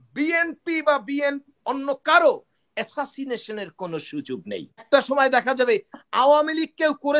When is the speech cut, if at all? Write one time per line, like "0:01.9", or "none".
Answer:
0:04.8